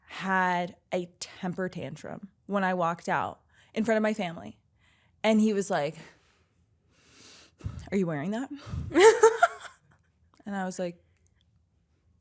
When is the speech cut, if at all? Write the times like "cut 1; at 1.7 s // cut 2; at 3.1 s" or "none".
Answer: none